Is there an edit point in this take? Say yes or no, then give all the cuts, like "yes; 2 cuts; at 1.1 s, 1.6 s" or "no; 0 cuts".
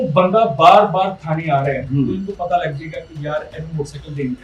no; 0 cuts